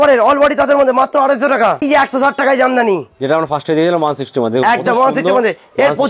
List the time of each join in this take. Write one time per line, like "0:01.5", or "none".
0:01.8